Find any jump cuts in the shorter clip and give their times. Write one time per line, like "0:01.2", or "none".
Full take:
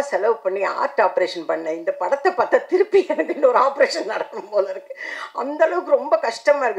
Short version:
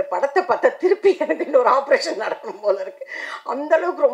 none

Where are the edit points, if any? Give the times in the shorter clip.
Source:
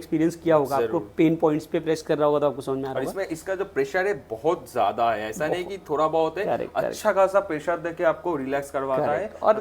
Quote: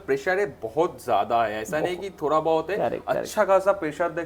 none

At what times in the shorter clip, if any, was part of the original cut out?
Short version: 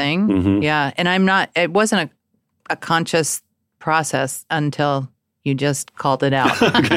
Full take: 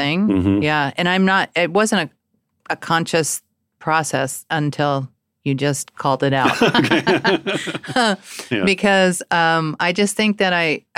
none

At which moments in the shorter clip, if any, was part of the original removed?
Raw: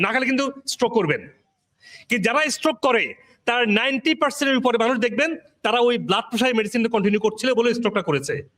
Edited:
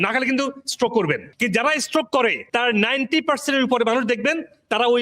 0:01.3
0:02.4

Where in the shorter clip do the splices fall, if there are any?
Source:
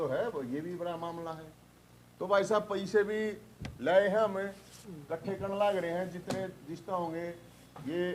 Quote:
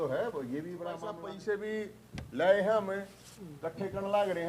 0:01.2

